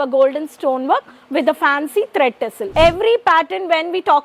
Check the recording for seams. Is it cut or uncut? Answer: cut